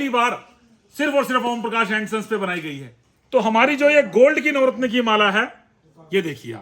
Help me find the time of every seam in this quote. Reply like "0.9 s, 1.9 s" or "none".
none